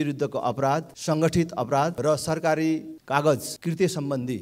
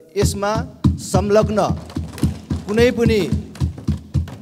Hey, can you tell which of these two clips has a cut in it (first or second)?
first